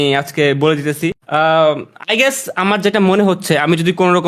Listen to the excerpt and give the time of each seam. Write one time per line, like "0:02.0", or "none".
0:01.2